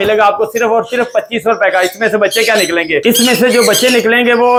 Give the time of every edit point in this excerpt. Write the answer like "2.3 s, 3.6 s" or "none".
none